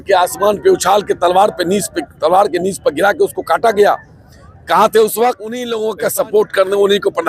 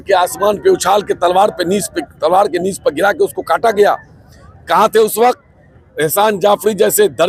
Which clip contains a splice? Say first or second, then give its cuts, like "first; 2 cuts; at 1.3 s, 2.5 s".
first; 1 cut; at 5.7 s